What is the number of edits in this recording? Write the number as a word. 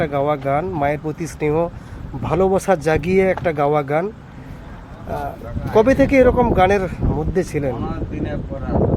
zero